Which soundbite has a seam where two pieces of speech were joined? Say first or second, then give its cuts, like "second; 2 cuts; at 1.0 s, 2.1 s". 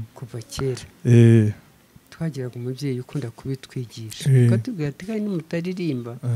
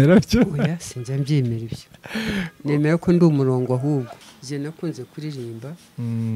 second; 1 cut; at 4.1 s